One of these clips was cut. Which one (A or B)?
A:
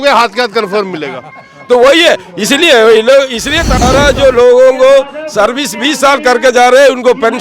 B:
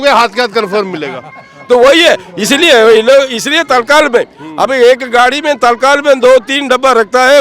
A